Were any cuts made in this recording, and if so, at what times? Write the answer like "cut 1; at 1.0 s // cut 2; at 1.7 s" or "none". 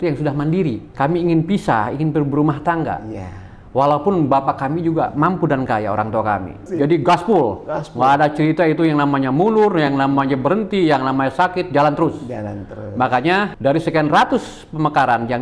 cut 1; at 0.9 s // cut 2; at 6.6 s // cut 3; at 13.5 s